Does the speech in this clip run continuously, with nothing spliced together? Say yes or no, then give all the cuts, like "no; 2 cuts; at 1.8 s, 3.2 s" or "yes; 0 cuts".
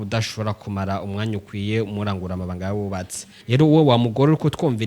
no; 1 cut; at 3.3 s